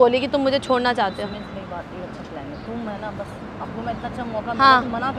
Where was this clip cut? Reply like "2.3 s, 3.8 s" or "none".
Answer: none